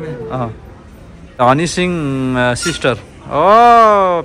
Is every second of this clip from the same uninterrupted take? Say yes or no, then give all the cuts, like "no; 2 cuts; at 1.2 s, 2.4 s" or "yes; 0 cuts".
no; 1 cut; at 1.4 s